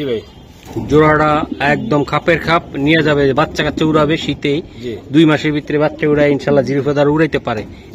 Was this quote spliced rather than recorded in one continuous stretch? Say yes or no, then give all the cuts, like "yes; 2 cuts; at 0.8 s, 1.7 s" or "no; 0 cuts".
no; 0 cuts